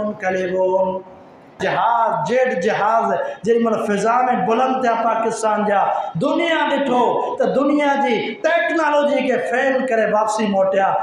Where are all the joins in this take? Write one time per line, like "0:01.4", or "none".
0:01.6

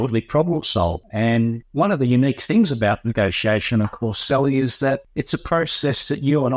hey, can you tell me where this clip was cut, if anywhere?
0:01.2
0:05.1

